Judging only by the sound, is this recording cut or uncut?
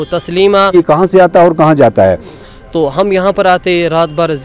cut